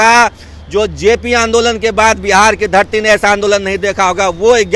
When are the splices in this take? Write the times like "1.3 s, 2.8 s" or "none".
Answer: none